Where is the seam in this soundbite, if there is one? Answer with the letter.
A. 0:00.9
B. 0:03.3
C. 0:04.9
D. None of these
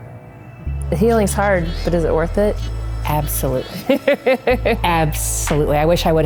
D